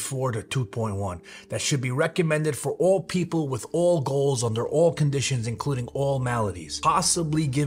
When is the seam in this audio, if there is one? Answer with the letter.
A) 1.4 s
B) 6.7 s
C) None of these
B